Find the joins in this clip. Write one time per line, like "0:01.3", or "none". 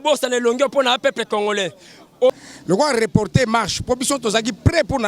0:02.3